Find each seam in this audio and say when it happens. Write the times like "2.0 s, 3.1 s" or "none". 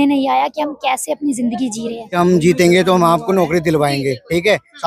2.1 s